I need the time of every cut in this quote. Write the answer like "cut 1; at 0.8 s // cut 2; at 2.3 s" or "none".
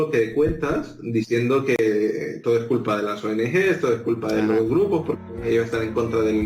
none